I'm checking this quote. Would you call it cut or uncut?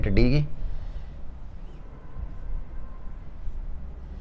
uncut